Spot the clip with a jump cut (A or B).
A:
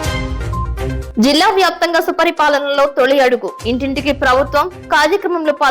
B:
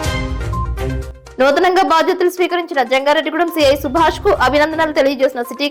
A